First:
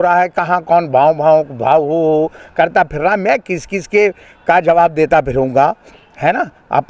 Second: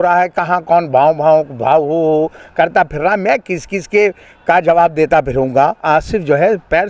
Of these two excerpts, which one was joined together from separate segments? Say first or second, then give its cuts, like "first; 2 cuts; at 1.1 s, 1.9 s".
second; 1 cut; at 5.8 s